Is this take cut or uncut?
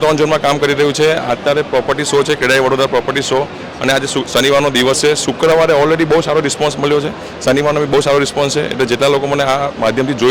uncut